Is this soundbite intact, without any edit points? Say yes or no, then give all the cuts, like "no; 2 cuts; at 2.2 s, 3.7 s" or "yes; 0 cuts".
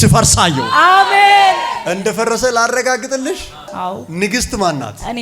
no; 1 cut; at 1.8 s